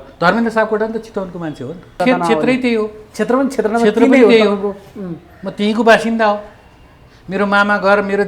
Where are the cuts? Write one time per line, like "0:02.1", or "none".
0:02.0